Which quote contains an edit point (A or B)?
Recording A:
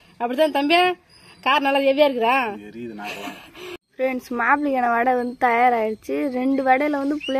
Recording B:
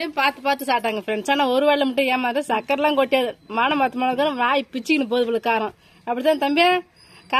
A